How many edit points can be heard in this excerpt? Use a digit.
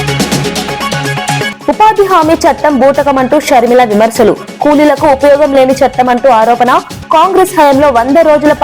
1